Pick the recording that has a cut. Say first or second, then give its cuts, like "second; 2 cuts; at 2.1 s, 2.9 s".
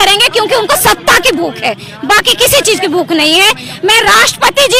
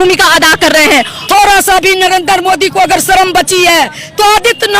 second; 1 cut; at 1.2 s